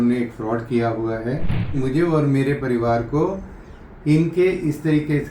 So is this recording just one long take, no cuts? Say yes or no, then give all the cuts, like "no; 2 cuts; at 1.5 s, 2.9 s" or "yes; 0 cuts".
no; 1 cut; at 1.8 s